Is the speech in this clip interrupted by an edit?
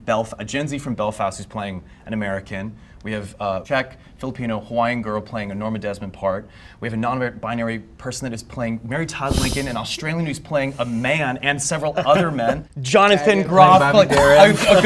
yes; 2 cuts; at 3.6 s, 12.7 s

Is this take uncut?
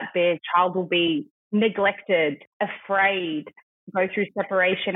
no; 2 cuts; at 1.4 s, 2.5 s

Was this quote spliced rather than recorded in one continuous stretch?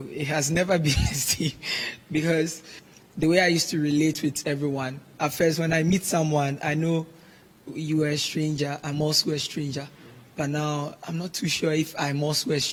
no; 0 cuts

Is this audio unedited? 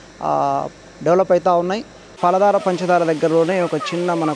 no; 1 cut; at 2.1 s

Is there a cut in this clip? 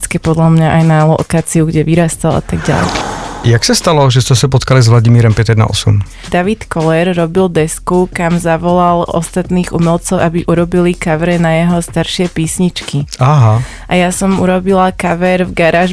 yes; 2 cuts; at 3.2 s, 6.2 s

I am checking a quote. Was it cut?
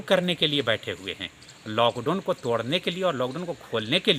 no; 0 cuts

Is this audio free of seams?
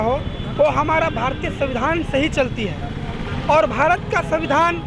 yes; 0 cuts

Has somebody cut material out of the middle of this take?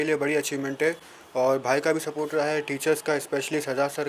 no; 0 cuts

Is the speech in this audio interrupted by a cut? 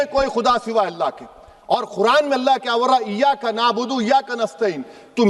no; 0 cuts

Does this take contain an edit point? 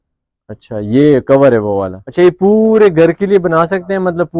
yes; 1 cut; at 2.0 s

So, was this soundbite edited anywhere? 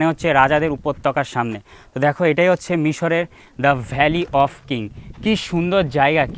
no; 0 cuts

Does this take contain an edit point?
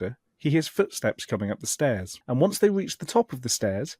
yes; 1 cut; at 2.1 s

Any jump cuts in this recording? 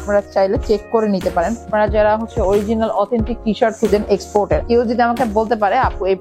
yes; 2 cuts; at 1.7 s, 4.6 s

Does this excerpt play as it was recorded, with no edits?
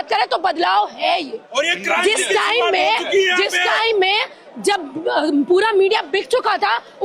yes; 0 cuts

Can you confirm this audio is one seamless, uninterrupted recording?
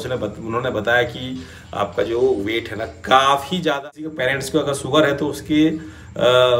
no; 1 cut; at 3.8 s

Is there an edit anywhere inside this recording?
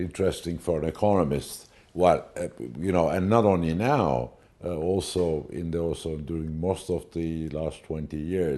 yes; 1 cut; at 7.2 s

